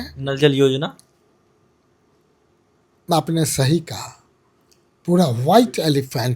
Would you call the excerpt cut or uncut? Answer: uncut